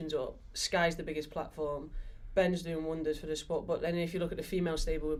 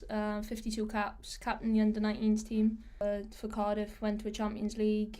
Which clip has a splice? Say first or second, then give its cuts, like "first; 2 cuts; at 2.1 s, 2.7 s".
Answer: second; 1 cut; at 3.0 s